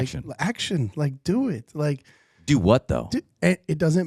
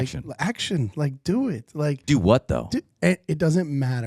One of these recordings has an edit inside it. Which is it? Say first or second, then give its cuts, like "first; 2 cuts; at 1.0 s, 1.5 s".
second; 1 cut; at 2.0 s